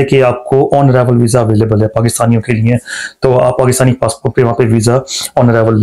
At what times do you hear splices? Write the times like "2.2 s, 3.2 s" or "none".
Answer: none